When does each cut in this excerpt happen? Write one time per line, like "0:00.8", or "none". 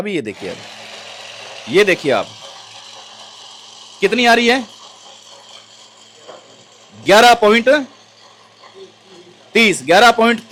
none